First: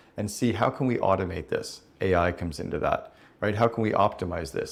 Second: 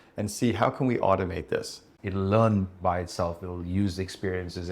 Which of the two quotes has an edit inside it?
second; 1 cut; at 1.8 s

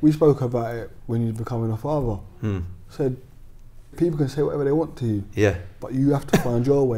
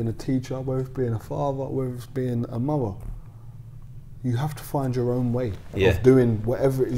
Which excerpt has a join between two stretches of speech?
first; 1 cut; at 3.9 s

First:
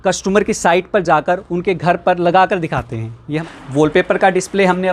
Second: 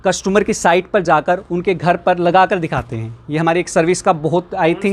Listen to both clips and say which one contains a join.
first; 1 cut; at 3.4 s

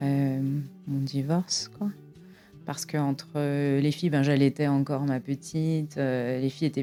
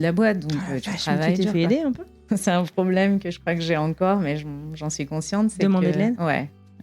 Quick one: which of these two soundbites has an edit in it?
second; 1 cut; at 2.2 s

